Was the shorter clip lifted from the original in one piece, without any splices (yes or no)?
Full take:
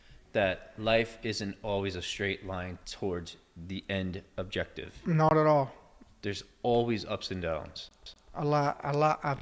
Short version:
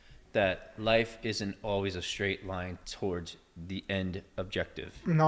yes